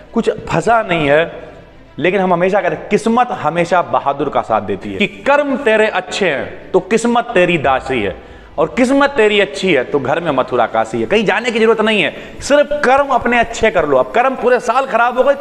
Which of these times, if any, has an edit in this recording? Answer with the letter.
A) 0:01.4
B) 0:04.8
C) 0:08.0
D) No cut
B